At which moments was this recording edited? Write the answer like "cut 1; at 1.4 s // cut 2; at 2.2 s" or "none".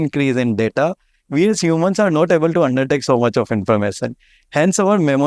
none